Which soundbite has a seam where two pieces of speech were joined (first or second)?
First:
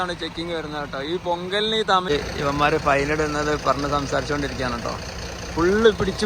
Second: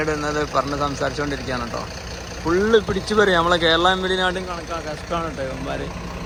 first